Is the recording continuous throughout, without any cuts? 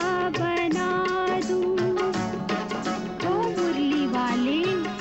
yes; 0 cuts

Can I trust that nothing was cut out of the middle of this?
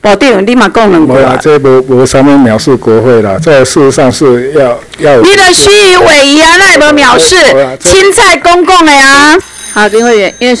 no; 1 cut; at 9.4 s

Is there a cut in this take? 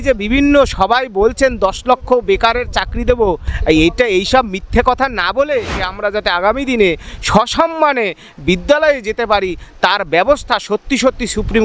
yes; 2 cuts; at 3.5 s, 5.8 s

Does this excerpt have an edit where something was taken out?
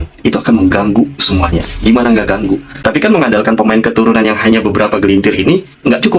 yes; 1 cut; at 2.7 s

